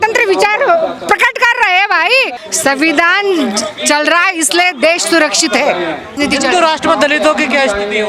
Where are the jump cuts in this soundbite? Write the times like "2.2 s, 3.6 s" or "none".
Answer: 2.4 s, 6.1 s